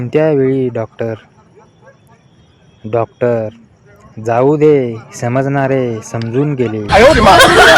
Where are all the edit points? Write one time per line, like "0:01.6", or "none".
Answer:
0:06.8